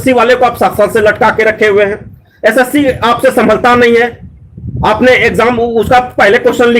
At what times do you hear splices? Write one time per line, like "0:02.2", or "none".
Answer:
none

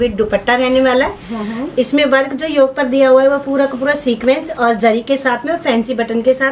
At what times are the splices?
none

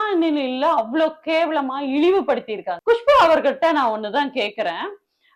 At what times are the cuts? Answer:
0:02.7

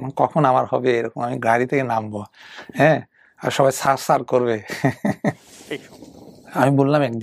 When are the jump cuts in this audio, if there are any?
0:05.5

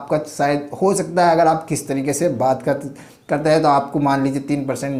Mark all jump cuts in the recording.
none

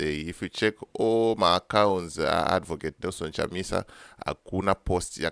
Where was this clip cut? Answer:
none

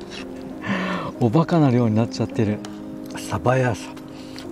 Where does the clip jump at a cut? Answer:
0:02.9

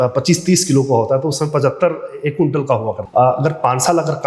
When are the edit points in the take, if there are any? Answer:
0:03.0

